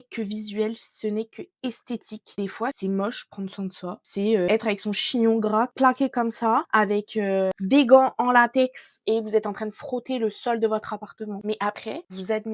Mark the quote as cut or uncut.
uncut